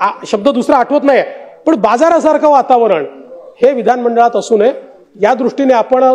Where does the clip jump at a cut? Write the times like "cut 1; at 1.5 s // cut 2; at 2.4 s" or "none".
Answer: none